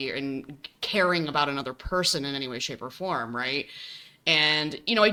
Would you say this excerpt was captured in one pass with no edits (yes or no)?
yes